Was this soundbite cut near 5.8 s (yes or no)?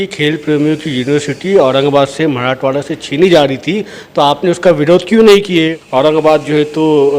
yes